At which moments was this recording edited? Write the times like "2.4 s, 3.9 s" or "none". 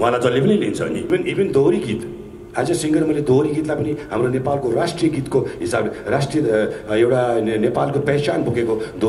1.1 s